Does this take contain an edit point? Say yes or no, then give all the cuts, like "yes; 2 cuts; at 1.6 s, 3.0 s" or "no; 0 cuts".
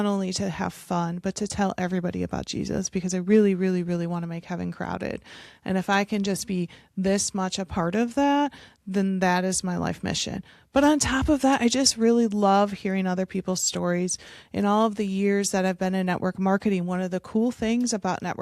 no; 0 cuts